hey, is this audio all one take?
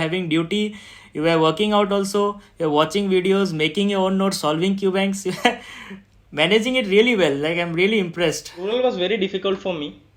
no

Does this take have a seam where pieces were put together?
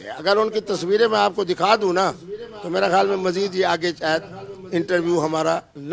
no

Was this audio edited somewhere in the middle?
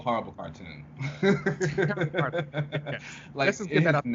no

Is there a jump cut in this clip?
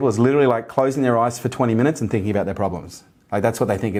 no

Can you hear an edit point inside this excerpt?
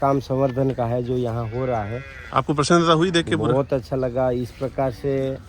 no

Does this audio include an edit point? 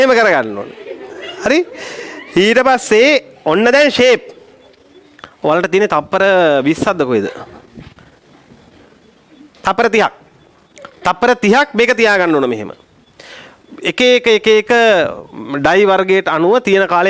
no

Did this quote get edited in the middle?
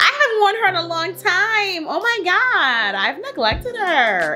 no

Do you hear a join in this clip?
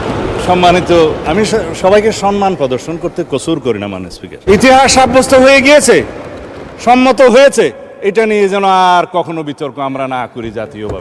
yes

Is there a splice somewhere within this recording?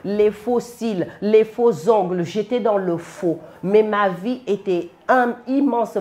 no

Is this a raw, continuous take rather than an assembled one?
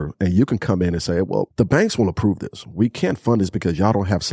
no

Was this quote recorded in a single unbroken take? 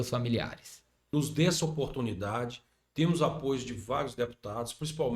no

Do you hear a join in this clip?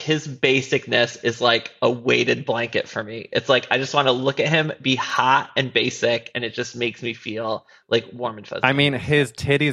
no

